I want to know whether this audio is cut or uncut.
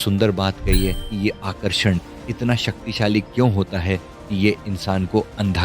cut